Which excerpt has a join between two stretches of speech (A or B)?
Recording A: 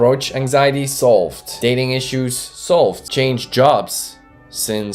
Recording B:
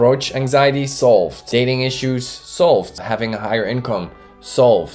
B